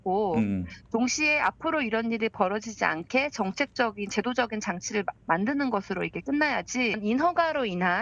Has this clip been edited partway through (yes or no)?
yes